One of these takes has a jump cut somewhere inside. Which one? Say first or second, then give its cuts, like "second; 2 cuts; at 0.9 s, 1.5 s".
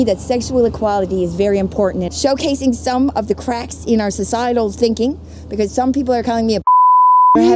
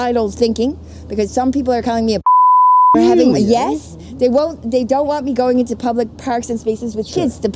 first; 1 cut; at 2.1 s